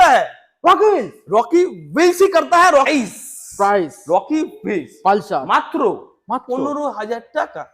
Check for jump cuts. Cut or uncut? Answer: cut